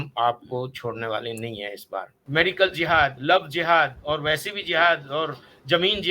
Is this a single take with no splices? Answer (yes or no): no